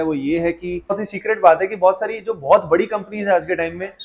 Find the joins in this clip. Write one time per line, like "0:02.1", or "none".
0:01.0